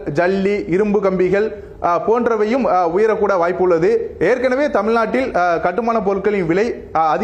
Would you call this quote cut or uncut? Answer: uncut